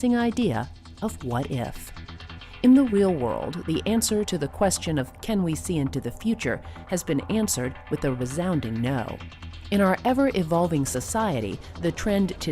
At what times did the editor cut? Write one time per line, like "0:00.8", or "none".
0:02.9